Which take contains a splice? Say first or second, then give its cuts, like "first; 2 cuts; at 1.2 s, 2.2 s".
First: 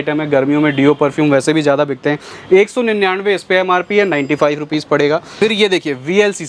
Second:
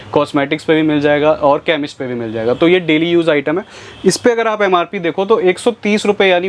first; 1 cut; at 5.3 s